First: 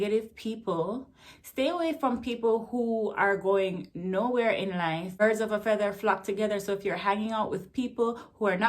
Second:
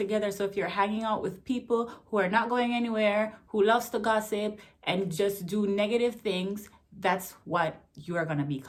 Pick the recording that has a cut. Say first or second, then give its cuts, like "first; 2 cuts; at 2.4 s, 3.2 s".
first; 1 cut; at 5.1 s